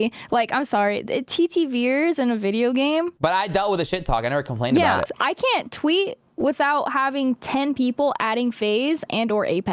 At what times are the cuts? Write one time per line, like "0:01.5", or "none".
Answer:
0:03.1
0:05.0